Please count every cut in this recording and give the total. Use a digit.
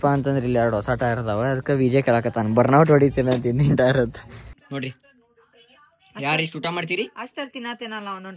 1